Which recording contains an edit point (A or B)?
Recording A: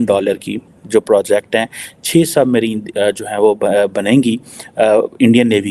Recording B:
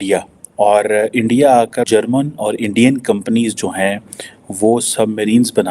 B